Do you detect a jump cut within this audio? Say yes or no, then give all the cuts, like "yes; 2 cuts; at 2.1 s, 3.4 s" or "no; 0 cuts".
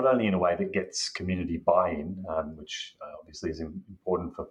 no; 0 cuts